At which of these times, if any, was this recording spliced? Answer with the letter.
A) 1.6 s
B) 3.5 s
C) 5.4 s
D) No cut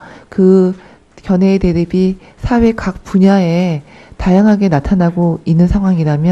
D